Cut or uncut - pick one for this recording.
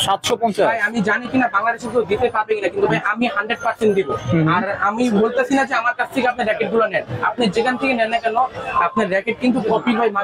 uncut